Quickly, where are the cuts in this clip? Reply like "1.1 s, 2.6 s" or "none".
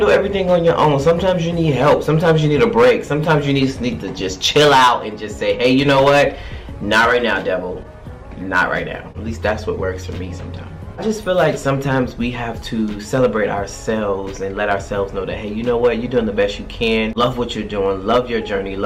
none